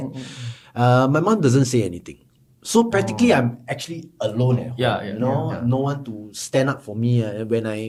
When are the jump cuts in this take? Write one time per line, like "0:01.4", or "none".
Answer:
none